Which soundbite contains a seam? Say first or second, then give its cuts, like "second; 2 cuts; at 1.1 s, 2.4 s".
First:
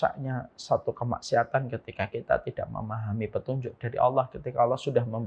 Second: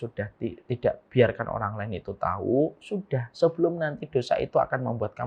second; 1 cut; at 1.0 s